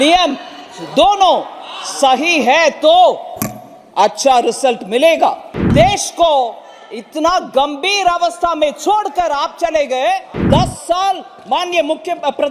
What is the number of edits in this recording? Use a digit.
2